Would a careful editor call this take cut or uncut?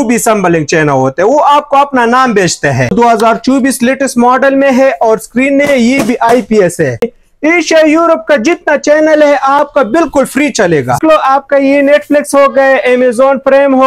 cut